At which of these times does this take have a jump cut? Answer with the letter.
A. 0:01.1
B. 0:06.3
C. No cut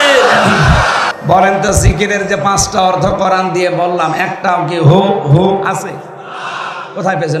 A